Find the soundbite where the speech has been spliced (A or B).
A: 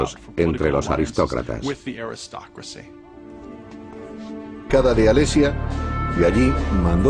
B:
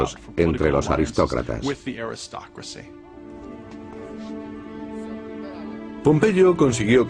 B